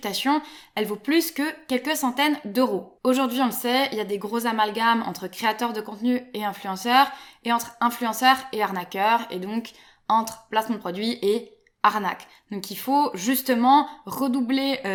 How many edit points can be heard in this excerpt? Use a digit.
0